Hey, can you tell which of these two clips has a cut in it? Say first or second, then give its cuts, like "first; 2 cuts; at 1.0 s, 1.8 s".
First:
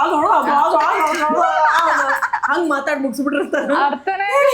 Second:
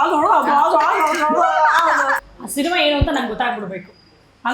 second; 1 cut; at 2.2 s